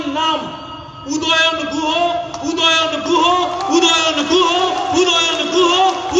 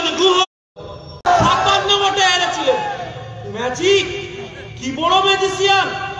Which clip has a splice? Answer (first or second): second